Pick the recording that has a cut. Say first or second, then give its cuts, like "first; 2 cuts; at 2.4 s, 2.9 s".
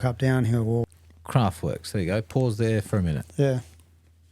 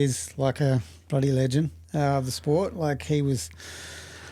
first; 1 cut; at 0.9 s